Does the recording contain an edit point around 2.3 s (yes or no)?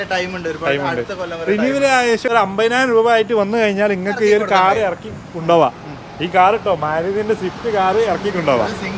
yes